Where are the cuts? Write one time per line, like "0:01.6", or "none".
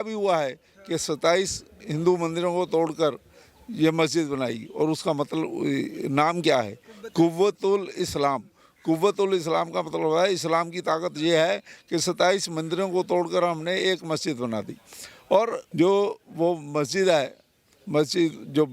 0:15.6